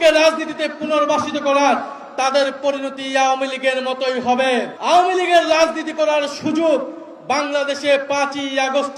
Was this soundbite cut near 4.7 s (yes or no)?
yes